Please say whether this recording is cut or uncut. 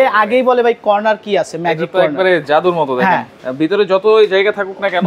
cut